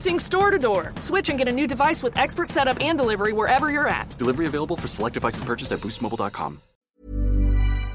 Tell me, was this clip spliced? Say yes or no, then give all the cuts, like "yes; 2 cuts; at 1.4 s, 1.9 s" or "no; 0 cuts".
yes; 1 cut; at 6.8 s